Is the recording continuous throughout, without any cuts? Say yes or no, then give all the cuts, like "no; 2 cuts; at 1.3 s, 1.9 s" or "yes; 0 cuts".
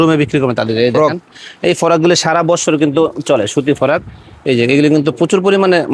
yes; 0 cuts